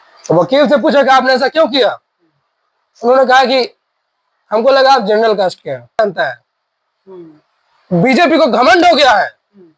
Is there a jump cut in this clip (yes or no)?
yes